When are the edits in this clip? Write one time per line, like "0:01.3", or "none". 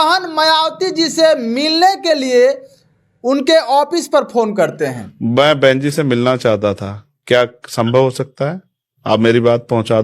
0:05.1

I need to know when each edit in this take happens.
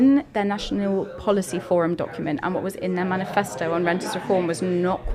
none

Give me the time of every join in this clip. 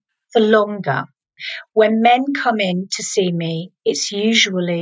0:01.2

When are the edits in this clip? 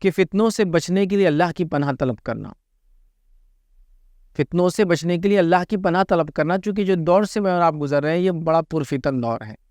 none

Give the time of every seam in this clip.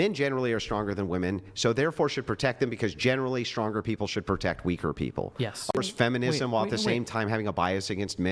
0:05.7

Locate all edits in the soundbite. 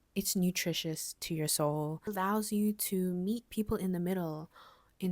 0:02.1

